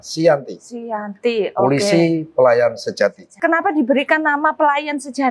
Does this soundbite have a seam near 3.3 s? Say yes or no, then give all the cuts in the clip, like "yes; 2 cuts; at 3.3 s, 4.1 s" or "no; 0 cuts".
yes; 1 cut; at 3.3 s